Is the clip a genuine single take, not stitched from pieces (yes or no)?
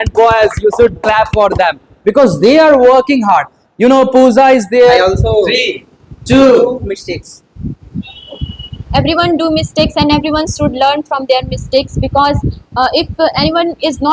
no